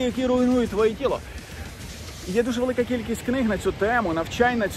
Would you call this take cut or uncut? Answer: uncut